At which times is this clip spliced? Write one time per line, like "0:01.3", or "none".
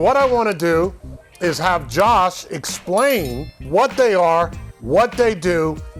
0:03.6

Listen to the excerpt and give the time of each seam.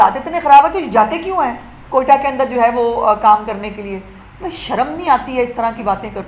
none

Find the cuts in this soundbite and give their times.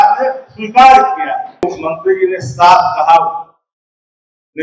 0:01.6

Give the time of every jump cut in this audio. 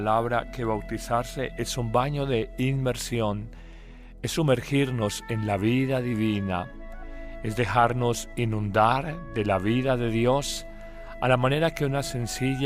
0:01.0

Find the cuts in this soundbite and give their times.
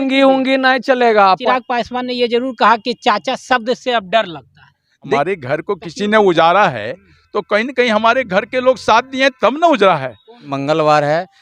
0:01.4
0:05.2
0:10.5

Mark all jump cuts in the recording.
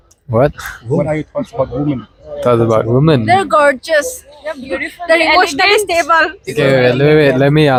none

